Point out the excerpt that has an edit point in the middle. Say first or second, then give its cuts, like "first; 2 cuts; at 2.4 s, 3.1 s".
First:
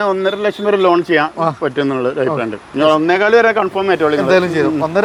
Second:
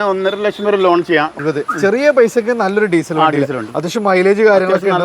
second; 1 cut; at 1.4 s